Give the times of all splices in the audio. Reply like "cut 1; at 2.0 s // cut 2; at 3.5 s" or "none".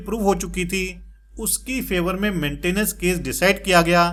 none